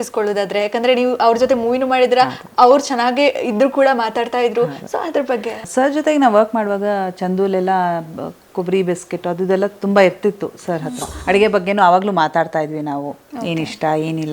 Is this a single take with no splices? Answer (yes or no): no